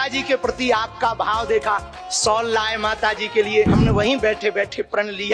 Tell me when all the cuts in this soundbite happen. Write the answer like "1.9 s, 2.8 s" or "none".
3.7 s